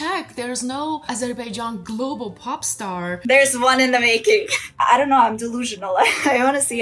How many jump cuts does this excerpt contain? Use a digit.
2